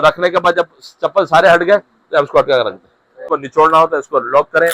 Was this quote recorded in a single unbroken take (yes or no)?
no